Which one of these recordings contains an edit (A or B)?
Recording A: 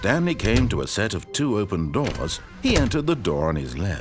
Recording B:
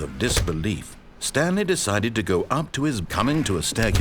B